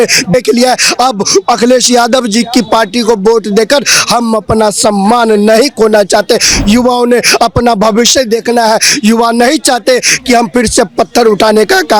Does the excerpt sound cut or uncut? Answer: uncut